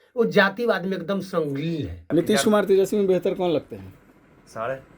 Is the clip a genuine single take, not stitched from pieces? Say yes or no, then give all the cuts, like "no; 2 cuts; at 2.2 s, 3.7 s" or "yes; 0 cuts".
no; 1 cut; at 2.0 s